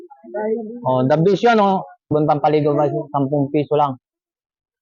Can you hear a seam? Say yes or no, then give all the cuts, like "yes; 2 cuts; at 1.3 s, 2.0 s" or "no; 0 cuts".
yes; 1 cut; at 2.0 s